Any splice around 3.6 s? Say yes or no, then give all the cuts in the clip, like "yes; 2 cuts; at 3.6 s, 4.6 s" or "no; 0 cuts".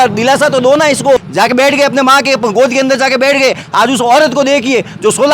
no; 1 cut; at 1.2 s